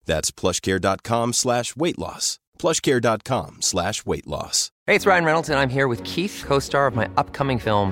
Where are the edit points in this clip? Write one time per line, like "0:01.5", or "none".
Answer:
0:04.6